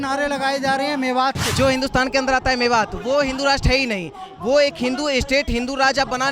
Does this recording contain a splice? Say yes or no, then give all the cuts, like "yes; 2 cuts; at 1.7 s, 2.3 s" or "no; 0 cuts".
yes; 1 cut; at 1.4 s